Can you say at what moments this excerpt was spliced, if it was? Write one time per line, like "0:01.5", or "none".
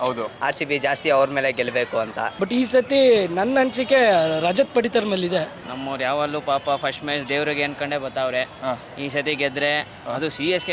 0:02.3
0:05.6